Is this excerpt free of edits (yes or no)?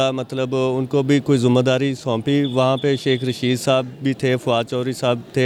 yes